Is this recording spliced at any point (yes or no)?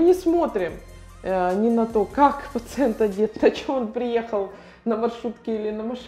no